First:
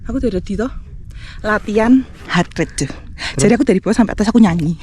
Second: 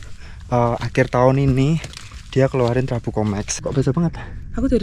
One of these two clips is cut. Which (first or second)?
second